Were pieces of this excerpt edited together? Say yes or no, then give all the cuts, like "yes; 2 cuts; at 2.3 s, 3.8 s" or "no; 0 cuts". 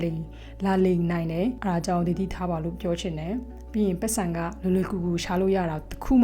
yes; 1 cut; at 1.6 s